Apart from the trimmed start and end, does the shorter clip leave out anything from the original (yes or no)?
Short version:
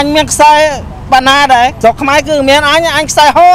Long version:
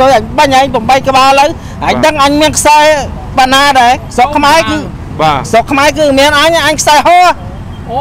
yes